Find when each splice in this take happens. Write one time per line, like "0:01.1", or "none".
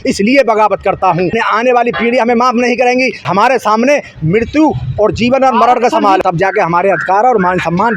0:01.3
0:03.3
0:06.2